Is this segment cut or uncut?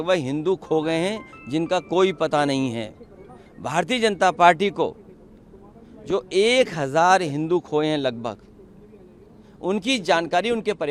uncut